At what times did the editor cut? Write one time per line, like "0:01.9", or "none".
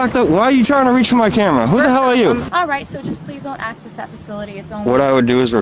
0:02.4

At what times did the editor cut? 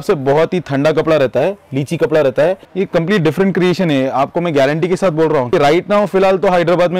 0:02.7
0:05.5

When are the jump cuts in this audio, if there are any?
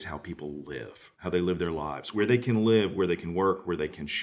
0:01.2
0:02.1

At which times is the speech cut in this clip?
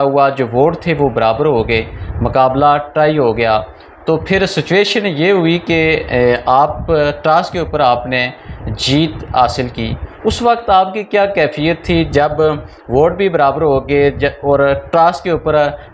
none

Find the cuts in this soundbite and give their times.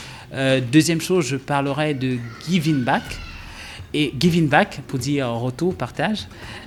none

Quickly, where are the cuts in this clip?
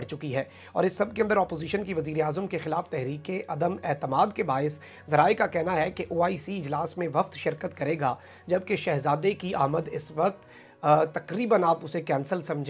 none

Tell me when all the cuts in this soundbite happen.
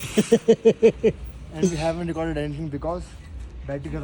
none

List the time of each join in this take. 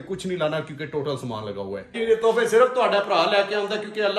0:02.0

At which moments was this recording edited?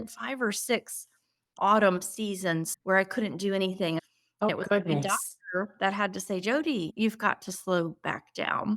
0:02.7
0:04.5

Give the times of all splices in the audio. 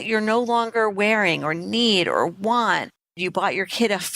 0:02.9

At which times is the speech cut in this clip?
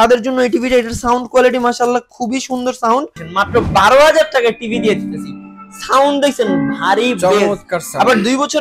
0:03.2

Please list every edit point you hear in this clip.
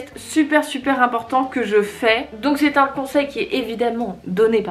0:02.3

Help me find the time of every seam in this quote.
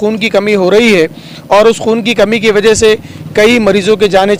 none

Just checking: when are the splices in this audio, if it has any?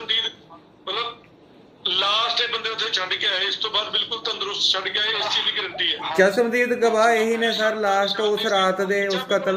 none

